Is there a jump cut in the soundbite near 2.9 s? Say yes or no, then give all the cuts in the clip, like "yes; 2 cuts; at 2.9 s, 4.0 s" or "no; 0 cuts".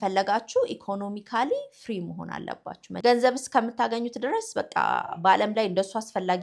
yes; 1 cut; at 2.9 s